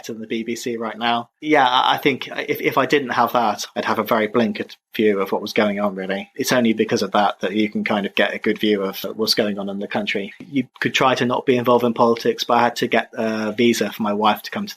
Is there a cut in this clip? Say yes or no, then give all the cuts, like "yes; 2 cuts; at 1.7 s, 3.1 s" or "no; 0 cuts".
yes; 2 cuts; at 6.3 s, 10.5 s